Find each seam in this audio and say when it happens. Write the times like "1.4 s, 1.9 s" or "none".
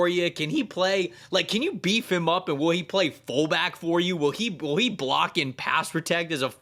none